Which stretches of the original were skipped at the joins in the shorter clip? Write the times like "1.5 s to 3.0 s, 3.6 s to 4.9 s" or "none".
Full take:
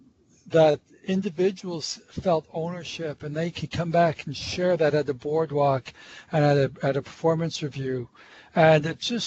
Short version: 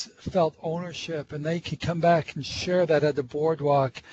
none